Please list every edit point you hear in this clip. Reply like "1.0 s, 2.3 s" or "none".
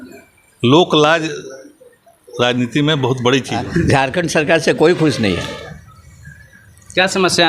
3.7 s